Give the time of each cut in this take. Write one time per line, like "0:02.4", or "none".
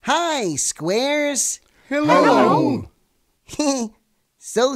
0:01.1